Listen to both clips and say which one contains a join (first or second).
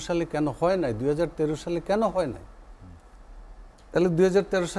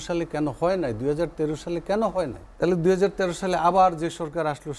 second